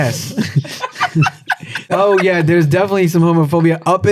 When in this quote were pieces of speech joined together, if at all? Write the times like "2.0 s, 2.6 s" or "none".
1.9 s